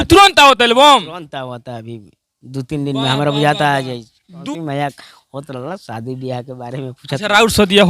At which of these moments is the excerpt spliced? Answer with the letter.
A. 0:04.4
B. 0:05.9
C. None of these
A